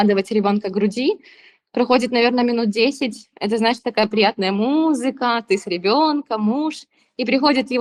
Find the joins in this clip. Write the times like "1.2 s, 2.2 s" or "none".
none